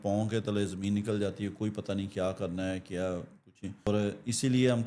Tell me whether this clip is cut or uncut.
cut